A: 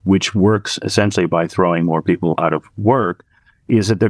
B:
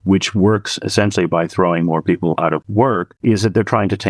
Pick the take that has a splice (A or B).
B